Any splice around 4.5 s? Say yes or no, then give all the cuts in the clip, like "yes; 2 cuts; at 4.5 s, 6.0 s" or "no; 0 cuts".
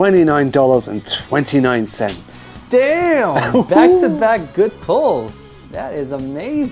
no; 0 cuts